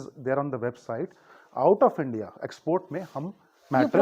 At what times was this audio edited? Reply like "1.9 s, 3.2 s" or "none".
1.2 s